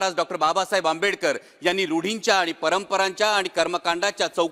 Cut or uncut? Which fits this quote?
uncut